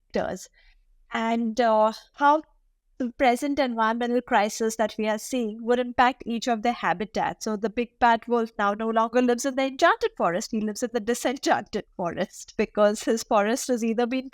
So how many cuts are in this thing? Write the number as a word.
one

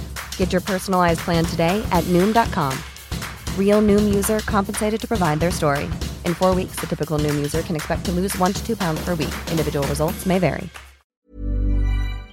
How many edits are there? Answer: one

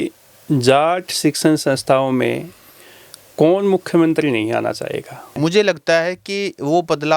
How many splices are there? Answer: one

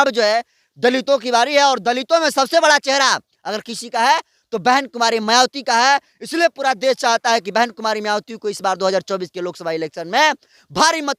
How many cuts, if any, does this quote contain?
zero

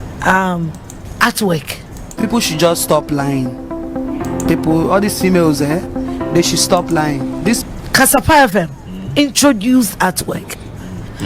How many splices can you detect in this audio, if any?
one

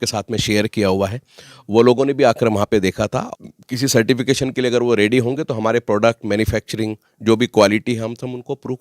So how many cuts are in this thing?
one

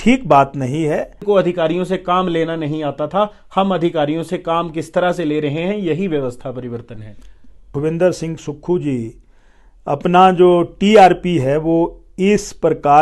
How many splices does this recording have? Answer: two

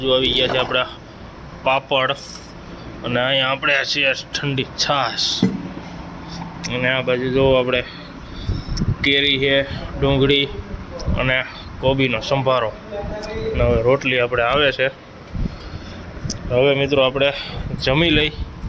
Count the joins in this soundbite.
zero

